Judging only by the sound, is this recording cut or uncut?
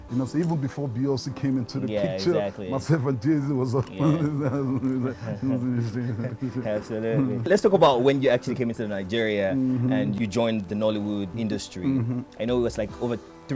uncut